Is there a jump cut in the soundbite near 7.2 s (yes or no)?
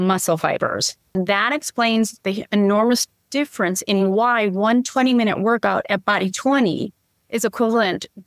no